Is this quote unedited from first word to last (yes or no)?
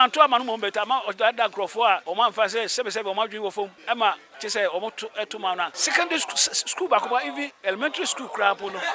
no